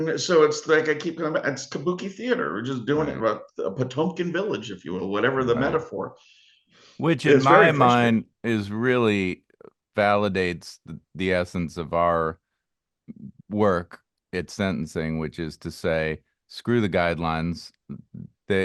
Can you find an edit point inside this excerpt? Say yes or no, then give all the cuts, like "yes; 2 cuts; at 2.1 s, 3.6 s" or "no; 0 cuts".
no; 0 cuts